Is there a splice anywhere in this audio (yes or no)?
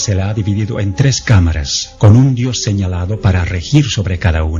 no